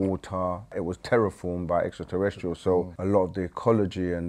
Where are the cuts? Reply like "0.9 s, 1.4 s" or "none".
0.8 s, 2.9 s